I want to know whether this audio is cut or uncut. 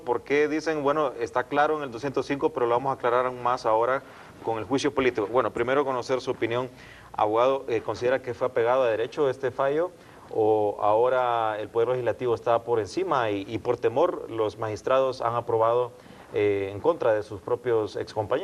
cut